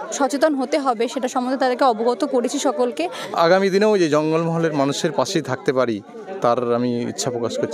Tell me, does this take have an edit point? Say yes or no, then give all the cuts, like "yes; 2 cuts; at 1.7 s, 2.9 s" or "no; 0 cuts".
yes; 1 cut; at 3.1 s